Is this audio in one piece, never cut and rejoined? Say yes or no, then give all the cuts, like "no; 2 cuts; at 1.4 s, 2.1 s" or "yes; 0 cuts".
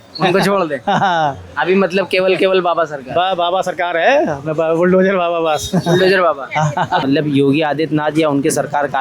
no; 1 cut; at 7.0 s